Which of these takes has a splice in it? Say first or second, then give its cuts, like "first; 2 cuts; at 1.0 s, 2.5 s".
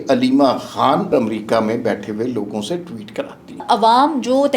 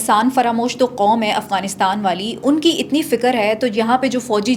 first; 2 cuts; at 1.1 s, 3.6 s